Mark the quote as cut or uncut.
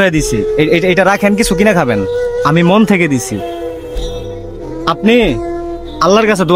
cut